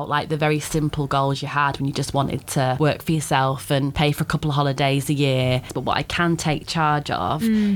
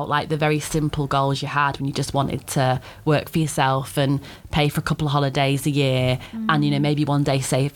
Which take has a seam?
first; 3 cuts; at 2.8 s, 3.9 s, 5.7 s

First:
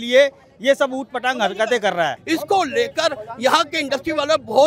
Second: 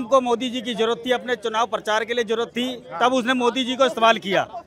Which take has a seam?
first; 1 cut; at 2.2 s

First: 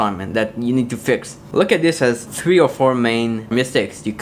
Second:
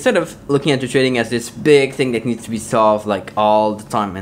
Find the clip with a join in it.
first; 3 cuts; at 1.4 s, 2.3 s, 3.5 s

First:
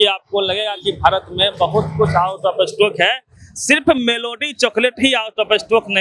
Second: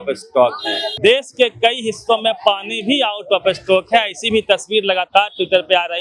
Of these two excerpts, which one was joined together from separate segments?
second; 1 cut; at 0.9 s

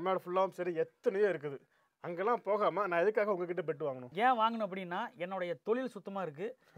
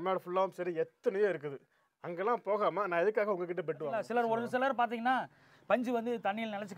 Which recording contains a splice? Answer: second; 1 cut; at 4.0 s

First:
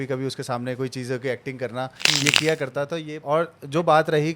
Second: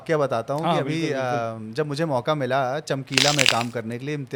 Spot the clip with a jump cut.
first; 1 cut; at 3.1 s

